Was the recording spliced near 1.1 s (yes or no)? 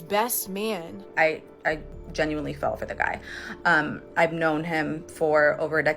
yes